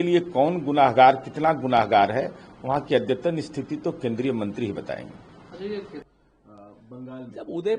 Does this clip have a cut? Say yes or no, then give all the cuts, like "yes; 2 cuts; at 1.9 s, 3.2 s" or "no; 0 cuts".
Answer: yes; 1 cut; at 6.0 s